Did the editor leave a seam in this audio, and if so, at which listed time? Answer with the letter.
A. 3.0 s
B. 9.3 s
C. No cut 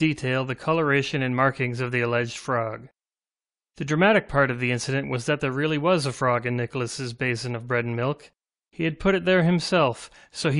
B